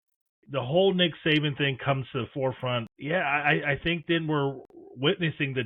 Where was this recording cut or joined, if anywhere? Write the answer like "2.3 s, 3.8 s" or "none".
2.9 s